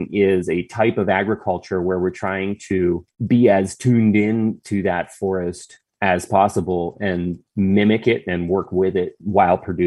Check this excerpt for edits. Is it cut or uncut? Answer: uncut